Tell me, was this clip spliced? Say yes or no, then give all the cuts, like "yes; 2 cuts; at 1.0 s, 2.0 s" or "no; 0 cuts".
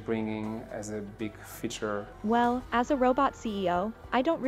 yes; 1 cut; at 2.1 s